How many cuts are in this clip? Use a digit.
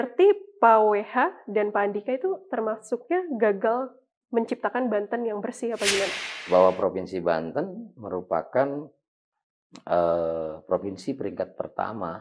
1